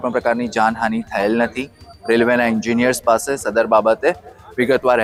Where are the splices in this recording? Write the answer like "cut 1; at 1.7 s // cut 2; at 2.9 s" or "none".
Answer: none